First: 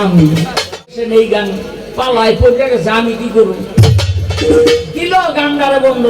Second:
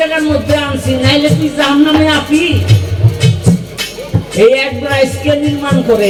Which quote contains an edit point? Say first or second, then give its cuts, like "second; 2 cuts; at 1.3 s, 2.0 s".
first; 1 cut; at 1.0 s